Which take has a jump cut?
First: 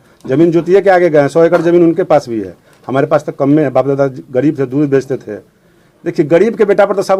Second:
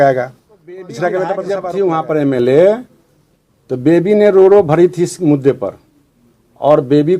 second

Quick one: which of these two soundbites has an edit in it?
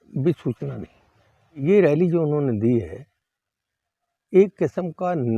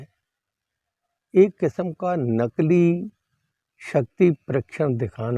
first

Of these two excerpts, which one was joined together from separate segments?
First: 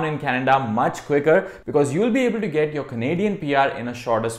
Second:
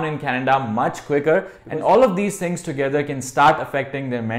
second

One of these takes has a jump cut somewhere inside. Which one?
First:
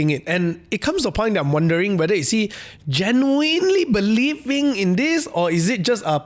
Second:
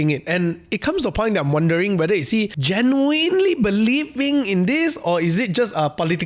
second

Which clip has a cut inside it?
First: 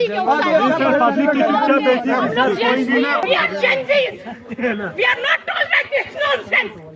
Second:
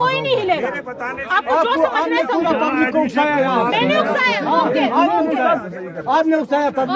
first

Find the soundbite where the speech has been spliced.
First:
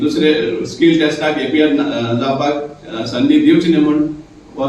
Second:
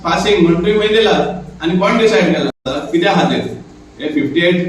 second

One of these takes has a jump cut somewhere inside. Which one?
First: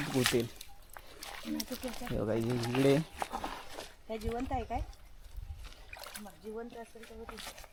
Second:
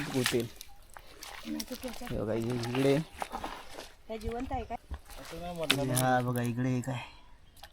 second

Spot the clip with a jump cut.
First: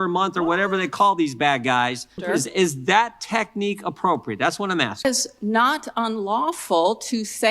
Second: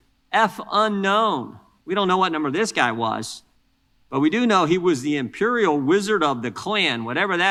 first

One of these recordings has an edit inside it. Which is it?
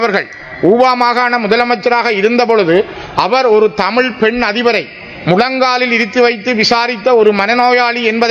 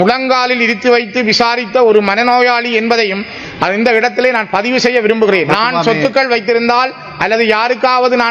second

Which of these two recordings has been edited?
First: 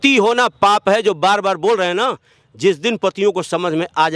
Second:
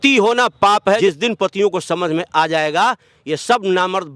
second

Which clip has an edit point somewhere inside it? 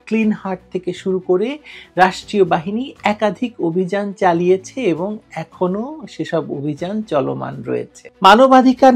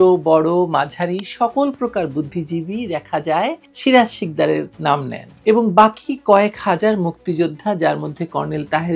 first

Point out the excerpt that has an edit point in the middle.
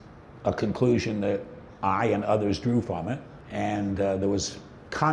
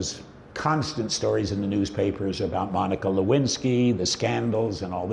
first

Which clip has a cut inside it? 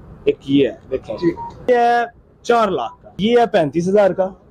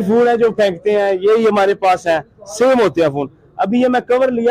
first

